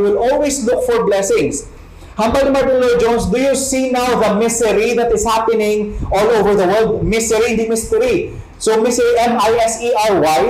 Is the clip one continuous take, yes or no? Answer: yes